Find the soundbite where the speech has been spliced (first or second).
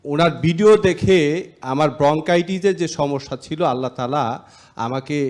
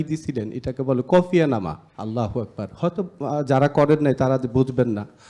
second